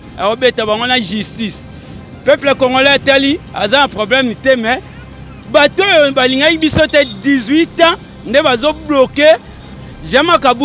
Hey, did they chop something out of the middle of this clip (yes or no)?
yes